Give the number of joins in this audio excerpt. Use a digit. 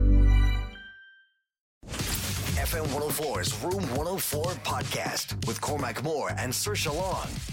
1